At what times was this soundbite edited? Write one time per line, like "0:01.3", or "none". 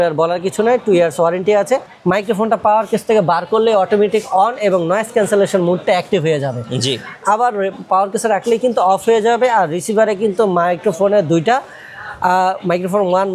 0:01.9